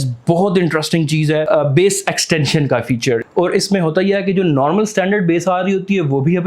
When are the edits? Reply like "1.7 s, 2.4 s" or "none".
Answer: 1.4 s, 3.3 s